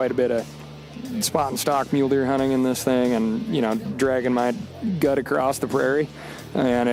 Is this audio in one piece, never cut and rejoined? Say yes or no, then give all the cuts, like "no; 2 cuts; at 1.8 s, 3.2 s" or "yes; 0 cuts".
yes; 0 cuts